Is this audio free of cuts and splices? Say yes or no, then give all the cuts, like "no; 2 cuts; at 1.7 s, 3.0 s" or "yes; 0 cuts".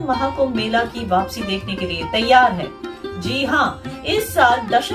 yes; 0 cuts